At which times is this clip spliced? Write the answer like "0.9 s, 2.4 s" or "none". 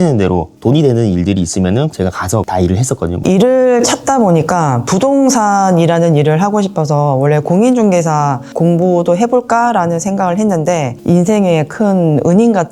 3.1 s, 10.9 s